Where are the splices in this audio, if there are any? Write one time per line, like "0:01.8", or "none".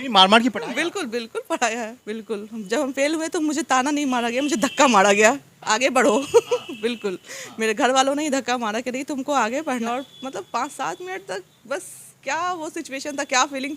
0:02.0
0:09.9